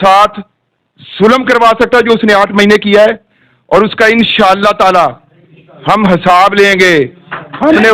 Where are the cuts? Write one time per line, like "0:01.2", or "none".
none